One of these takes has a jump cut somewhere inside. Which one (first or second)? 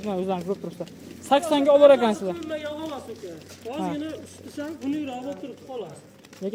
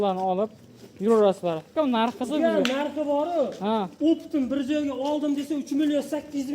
second